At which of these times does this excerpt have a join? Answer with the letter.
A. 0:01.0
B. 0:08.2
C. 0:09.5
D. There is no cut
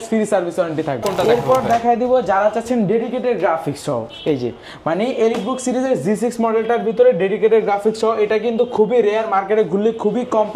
A